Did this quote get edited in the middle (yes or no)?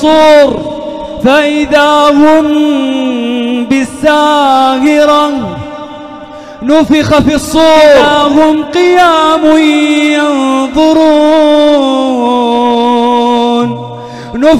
yes